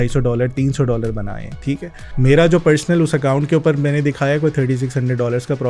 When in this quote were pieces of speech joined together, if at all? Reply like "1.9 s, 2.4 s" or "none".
2.0 s